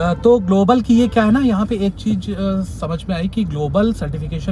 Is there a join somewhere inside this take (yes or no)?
no